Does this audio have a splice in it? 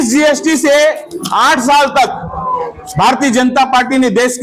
no; 0 cuts

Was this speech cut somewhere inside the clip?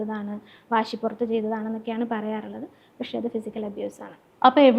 no; 0 cuts

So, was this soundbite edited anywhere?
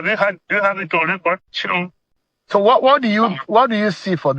yes; 1 cut; at 2.0 s

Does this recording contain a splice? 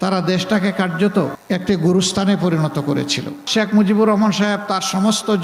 yes; 2 cuts; at 1.4 s, 3.4 s

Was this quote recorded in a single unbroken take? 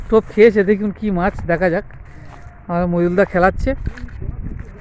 yes; 0 cuts

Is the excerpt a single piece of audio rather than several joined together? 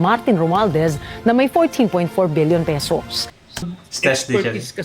no; 1 cut; at 3.8 s

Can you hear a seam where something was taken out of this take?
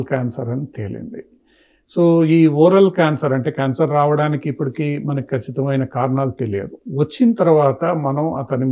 no; 0 cuts

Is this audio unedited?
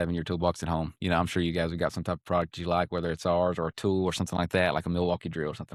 yes; 0 cuts

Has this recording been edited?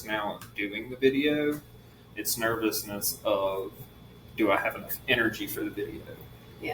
no; 0 cuts

